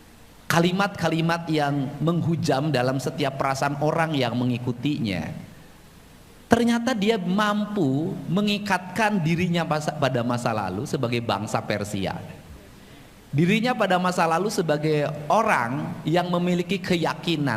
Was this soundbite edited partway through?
no; 0 cuts

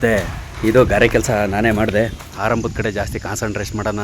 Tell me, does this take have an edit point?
yes; 1 cut; at 2.3 s

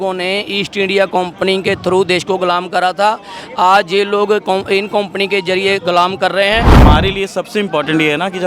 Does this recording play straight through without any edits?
no; 1 cut; at 6.8 s

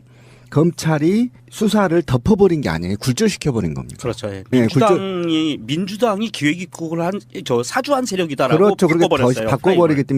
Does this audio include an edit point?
yes; 1 cut; at 5.6 s

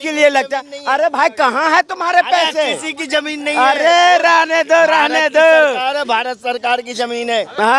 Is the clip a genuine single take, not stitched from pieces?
yes; 0 cuts

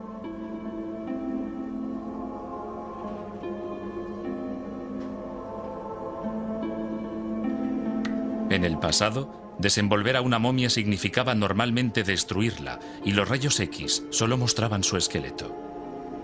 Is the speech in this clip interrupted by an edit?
no; 0 cuts

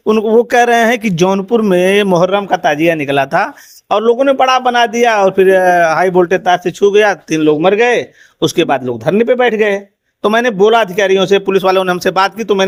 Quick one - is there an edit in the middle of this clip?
no; 0 cuts

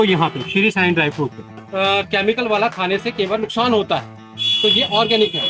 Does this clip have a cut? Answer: yes; 1 cut; at 1.6 s

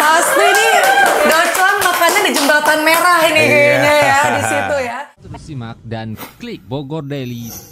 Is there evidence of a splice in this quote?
yes; 1 cut; at 4.9 s

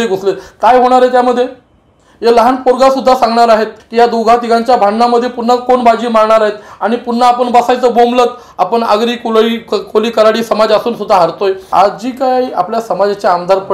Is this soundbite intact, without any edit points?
no; 2 cuts; at 3.8 s, 11.7 s

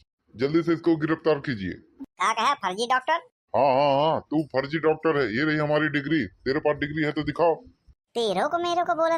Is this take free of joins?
yes; 0 cuts

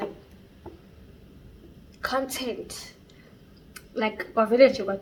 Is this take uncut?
yes; 0 cuts

